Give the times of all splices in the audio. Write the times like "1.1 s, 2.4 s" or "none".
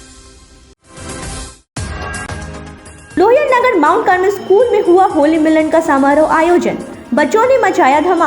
0.7 s, 2.4 s

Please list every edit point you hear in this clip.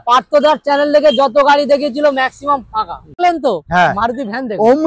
3.2 s

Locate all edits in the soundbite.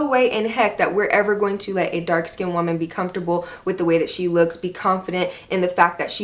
none

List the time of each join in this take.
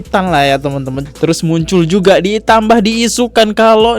1.0 s

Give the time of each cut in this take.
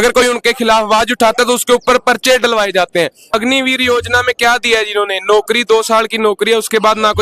3.3 s

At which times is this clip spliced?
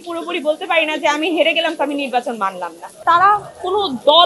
3.0 s

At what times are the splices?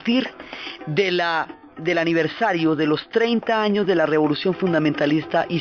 none

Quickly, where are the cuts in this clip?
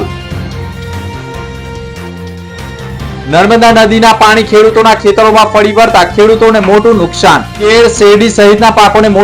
none

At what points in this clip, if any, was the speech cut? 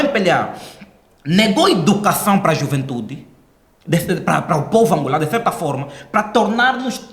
none

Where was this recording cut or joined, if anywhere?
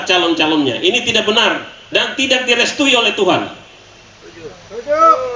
none

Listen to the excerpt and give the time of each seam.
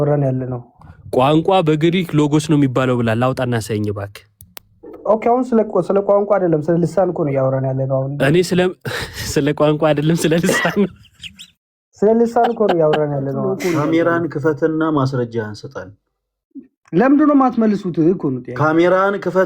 13.6 s

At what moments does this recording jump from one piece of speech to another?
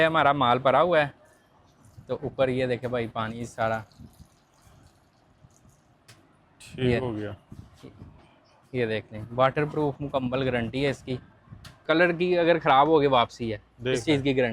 11.8 s

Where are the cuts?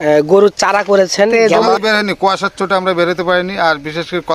1.3 s

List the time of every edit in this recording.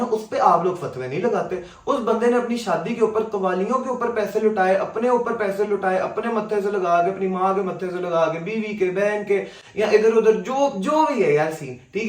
none

